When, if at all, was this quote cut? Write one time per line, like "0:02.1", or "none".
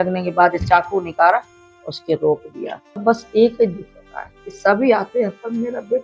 0:03.0